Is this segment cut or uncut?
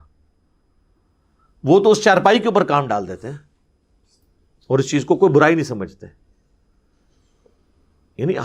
uncut